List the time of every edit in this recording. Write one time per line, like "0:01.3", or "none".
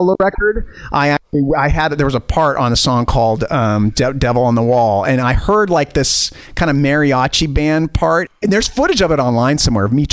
0:08.3